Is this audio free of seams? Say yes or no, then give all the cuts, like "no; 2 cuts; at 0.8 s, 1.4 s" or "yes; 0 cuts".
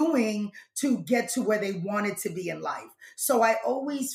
yes; 0 cuts